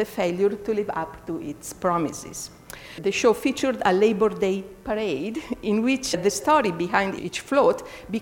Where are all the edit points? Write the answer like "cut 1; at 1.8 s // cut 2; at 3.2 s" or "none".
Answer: cut 1; at 2.9 s